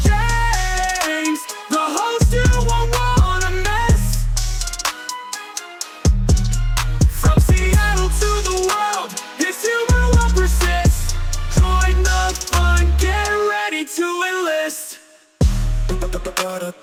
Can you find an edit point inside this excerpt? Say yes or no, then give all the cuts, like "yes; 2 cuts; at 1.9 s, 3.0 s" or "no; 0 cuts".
no; 0 cuts